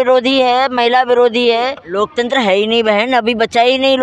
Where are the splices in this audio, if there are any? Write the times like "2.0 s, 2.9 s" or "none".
1.8 s